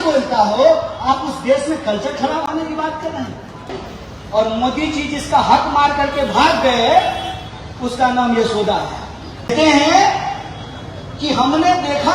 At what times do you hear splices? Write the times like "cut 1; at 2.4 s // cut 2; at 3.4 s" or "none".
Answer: cut 1; at 3.8 s // cut 2; at 9.5 s